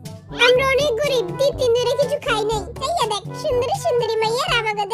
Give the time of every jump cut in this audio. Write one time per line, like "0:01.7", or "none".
0:02.8